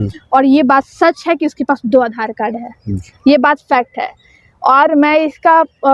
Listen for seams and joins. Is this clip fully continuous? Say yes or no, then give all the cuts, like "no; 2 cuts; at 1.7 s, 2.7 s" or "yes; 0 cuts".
yes; 0 cuts